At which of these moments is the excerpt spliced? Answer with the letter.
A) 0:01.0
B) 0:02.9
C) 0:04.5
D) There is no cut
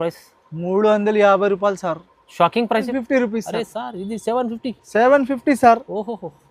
B